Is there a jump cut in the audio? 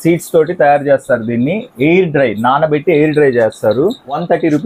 no; 0 cuts

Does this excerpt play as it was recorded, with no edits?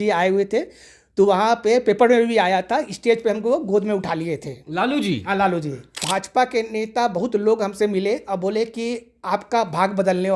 no; 1 cut; at 6.0 s

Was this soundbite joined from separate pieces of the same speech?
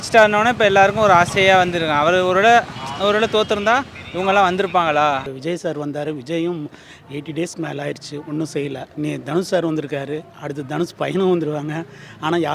yes; 2 cuts; at 5.3 s, 8.9 s

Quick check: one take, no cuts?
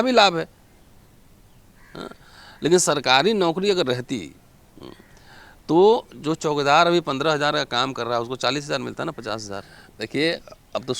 no; 1 cut; at 10.0 s

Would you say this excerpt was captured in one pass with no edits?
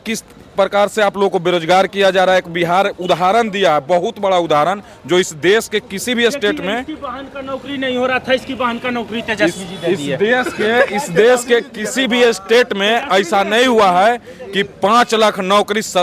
yes; 0 cuts

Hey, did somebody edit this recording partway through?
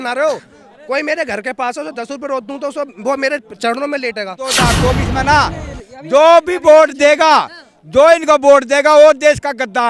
yes; 1 cut; at 4.6 s

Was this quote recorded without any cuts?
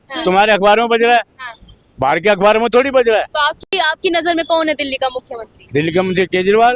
yes; 0 cuts

